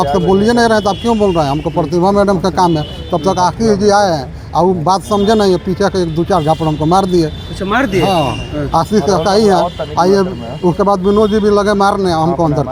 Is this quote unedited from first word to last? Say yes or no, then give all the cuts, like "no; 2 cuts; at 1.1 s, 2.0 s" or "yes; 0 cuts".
yes; 0 cuts